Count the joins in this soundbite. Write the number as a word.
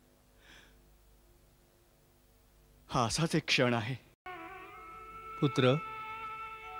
one